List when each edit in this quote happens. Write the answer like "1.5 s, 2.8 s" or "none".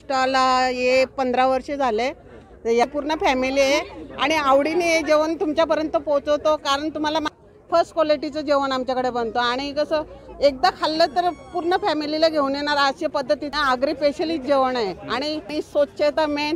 2.8 s, 7.3 s, 13.5 s, 15.5 s